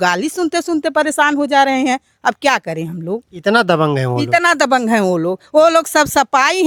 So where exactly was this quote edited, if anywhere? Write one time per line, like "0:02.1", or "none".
none